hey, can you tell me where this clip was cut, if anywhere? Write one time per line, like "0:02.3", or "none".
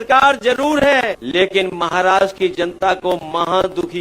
0:01.2